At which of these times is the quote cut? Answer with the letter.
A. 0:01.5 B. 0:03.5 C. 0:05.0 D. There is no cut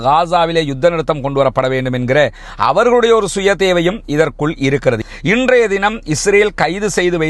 C